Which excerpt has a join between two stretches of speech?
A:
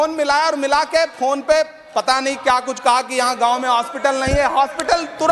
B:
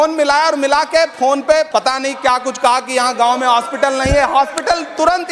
B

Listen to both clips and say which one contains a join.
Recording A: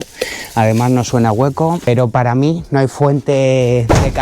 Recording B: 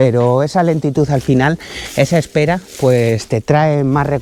A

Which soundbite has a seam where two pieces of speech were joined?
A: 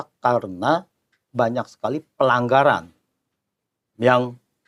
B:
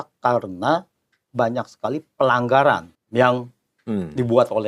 B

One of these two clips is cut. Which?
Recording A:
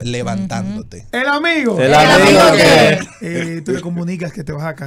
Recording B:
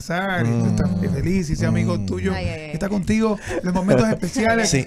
A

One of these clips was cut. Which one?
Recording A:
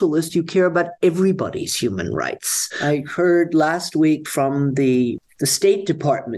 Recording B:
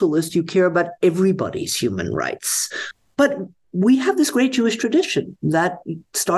A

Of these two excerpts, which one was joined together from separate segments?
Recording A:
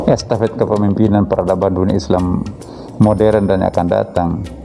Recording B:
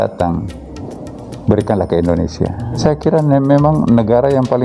B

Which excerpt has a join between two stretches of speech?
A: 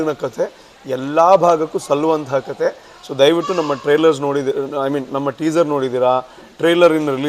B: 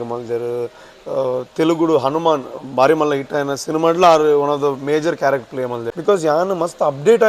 B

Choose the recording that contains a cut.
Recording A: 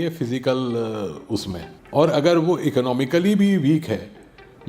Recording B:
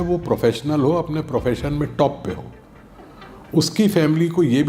A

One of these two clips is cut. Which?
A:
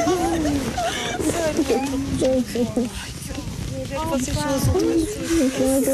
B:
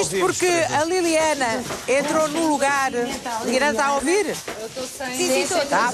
A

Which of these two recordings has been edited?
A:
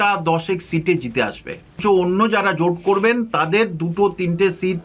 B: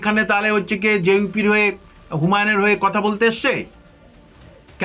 A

